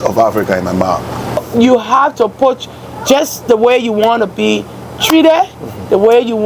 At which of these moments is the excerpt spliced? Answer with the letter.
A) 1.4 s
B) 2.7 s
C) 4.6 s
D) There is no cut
A